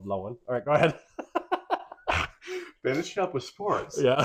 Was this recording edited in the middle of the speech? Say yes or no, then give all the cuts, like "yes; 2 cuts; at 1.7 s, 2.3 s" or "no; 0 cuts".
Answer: no; 0 cuts